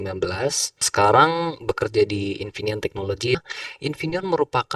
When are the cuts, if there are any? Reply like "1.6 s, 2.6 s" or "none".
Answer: 0.9 s, 3.4 s